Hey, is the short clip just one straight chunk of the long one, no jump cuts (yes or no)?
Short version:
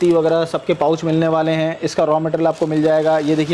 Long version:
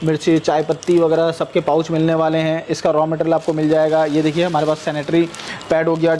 yes